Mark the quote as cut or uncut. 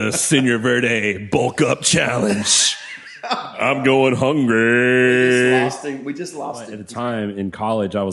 cut